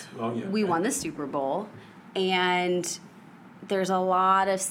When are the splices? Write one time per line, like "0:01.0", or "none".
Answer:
none